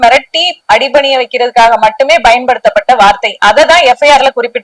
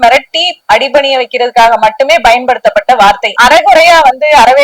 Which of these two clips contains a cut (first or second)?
second